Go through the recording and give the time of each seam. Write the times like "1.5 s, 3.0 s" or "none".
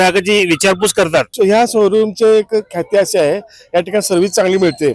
1.3 s